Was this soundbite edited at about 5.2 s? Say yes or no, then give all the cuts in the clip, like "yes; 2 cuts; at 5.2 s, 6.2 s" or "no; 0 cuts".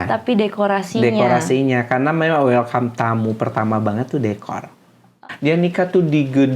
yes; 1 cut; at 5.2 s